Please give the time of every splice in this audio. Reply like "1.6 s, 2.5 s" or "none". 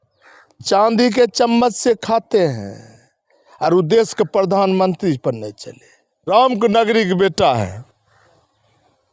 6.3 s